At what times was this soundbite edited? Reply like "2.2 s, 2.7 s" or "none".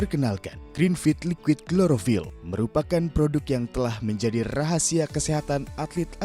none